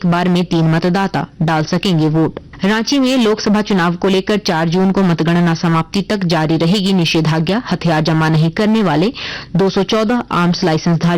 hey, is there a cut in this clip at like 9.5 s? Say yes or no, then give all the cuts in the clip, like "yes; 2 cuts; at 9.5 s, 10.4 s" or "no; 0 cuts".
no; 1 cut; at 2.5 s